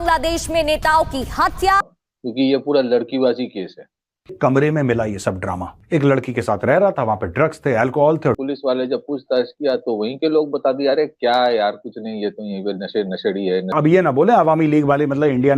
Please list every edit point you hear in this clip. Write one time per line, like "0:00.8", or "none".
0:02.0
0:05.7
0:08.4
0:13.7